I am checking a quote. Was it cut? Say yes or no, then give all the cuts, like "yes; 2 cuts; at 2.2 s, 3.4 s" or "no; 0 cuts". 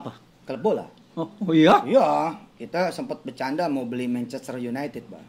no; 0 cuts